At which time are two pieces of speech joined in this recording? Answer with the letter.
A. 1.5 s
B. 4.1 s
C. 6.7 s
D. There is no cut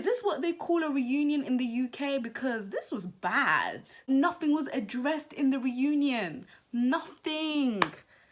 B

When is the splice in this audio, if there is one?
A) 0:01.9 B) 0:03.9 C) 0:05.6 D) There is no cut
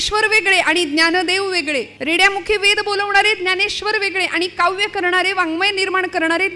A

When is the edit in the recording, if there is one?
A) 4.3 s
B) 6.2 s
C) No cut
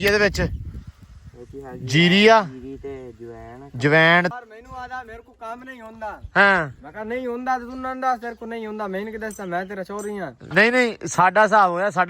A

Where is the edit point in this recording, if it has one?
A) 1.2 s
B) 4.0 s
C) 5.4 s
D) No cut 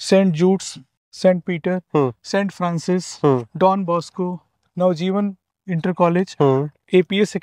D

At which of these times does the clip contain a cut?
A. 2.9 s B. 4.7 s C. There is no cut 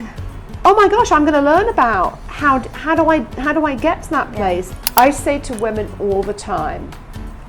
B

